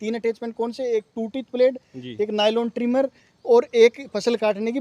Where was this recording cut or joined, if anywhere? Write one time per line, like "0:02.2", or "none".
none